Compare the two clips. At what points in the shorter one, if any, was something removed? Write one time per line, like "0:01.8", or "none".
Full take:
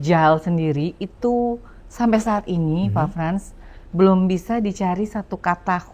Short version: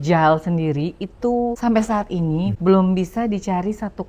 0:01.6
0:02.5

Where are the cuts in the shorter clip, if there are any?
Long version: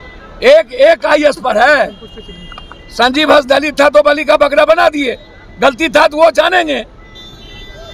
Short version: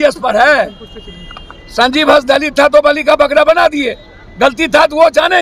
none

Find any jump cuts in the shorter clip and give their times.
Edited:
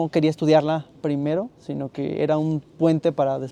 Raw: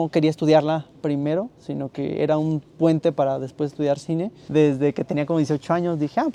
none

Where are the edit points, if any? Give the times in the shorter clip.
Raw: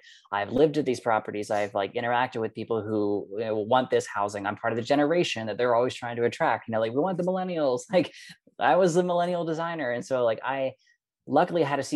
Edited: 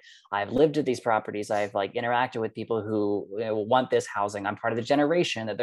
none

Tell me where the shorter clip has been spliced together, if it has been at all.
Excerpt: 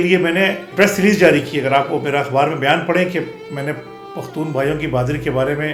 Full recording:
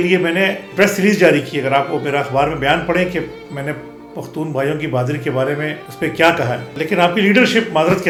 none

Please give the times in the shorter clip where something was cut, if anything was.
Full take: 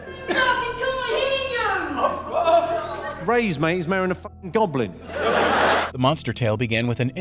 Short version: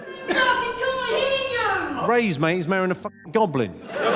0:01.9

